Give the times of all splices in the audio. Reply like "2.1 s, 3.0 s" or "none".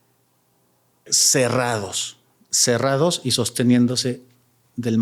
none